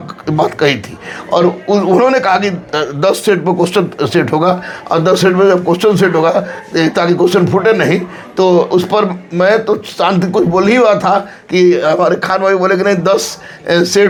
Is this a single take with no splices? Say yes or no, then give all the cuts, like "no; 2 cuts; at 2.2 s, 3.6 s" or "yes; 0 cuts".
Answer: yes; 0 cuts